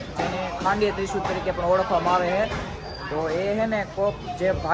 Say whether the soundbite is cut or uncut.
uncut